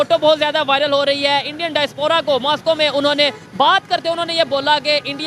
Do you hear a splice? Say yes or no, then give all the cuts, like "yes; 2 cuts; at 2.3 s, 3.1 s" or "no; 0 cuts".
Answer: no; 0 cuts